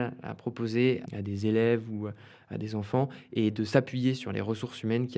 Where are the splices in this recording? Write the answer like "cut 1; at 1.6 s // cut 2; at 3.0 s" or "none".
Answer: cut 1; at 1.0 s